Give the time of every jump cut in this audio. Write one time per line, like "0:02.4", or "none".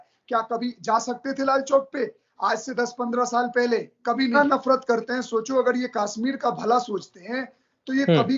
0:04.3

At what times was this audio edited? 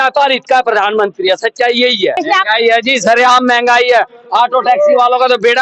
0:02.2

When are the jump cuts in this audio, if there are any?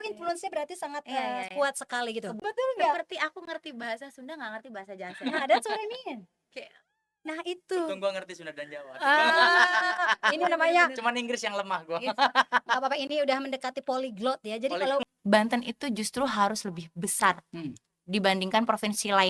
0:02.3
0:15.0

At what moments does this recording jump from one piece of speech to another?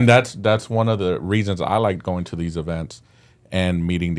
none

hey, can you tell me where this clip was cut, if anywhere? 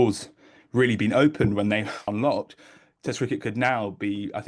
0:02.1

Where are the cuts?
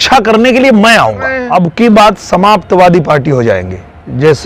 0:01.4

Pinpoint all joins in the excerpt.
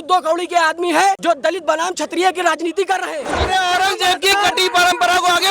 0:01.2
0:03.3

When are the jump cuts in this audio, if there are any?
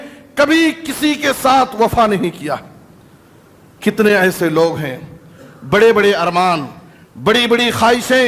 none

